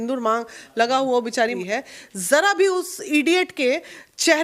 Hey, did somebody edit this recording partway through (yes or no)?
yes